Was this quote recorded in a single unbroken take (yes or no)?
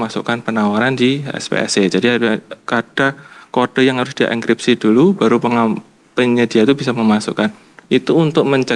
yes